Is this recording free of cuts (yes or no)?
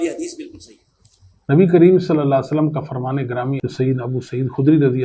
no